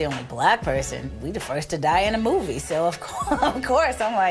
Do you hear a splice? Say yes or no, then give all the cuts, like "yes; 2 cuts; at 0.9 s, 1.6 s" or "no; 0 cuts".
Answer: yes; 1 cut; at 1.0 s